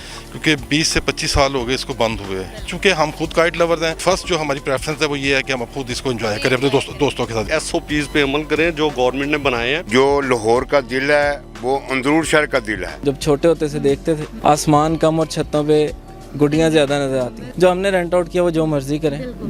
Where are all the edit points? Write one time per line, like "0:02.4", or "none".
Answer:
0:02.7
0:04.0
0:07.5
0:09.8
0:13.0
0:14.3
0:17.4